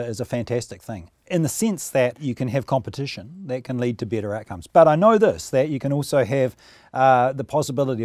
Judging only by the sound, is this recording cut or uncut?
cut